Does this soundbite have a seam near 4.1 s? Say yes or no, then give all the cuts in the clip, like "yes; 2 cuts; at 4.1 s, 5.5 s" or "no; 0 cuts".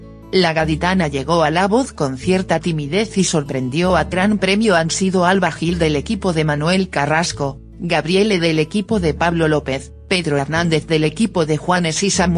no; 0 cuts